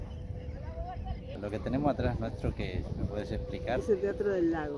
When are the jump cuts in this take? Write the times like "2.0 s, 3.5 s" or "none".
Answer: 1.3 s